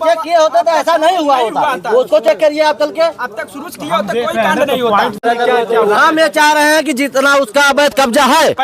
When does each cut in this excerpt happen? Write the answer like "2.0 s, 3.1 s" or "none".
5.2 s